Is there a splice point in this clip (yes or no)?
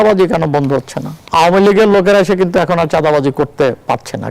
yes